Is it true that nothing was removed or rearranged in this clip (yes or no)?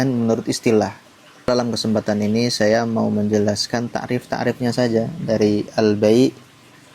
no